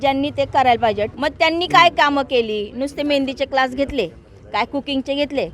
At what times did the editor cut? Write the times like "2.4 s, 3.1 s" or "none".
1.1 s

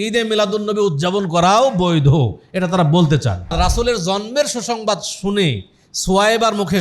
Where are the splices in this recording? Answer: 3.5 s

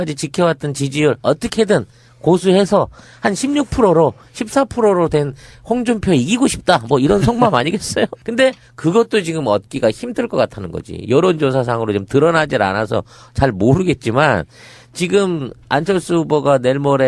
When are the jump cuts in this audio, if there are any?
2.4 s

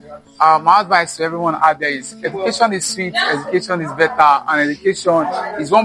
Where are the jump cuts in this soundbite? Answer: none

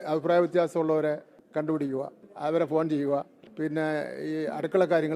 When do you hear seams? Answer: 1.3 s, 2.2 s, 3.4 s

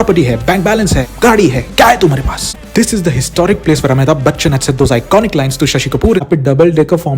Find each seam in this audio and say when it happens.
2.5 s, 6.2 s

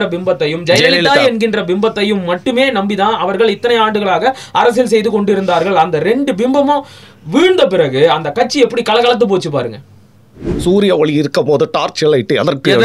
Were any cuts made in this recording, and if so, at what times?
10.5 s

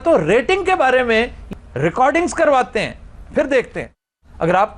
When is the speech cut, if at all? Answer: 1.4 s

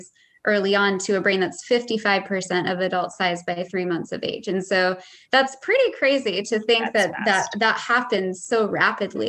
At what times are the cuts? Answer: 8.4 s

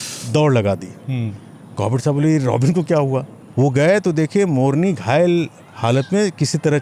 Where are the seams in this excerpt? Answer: 3.4 s

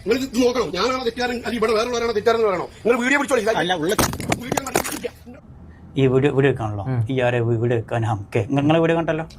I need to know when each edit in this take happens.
5.5 s

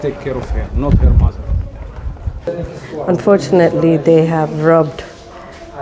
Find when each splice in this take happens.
2.4 s

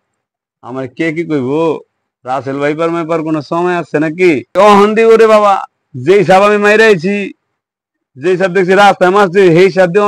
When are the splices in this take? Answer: 4.5 s

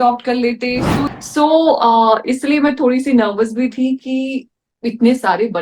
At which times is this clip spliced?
1.1 s

